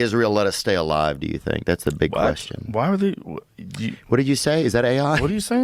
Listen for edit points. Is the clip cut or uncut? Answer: uncut